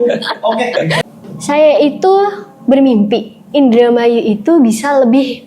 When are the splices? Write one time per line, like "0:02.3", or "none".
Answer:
0:01.0